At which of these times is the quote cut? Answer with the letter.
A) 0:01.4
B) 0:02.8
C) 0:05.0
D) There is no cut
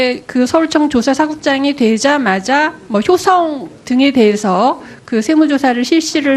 C